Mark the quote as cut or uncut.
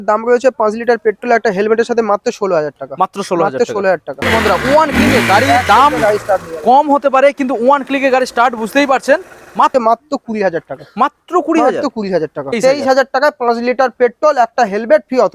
cut